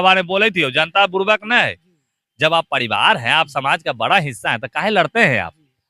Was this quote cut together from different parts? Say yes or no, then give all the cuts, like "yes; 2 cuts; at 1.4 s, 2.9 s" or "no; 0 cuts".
no; 0 cuts